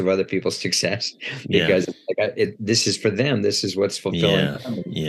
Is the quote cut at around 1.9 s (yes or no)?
no